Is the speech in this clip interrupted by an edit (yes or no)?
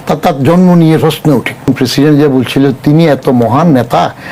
yes